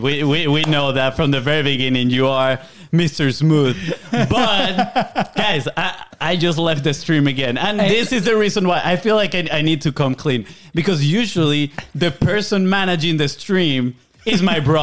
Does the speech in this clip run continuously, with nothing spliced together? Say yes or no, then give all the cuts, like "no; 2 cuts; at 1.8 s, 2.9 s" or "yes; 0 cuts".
yes; 0 cuts